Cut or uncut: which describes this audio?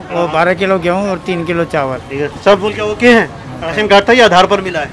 uncut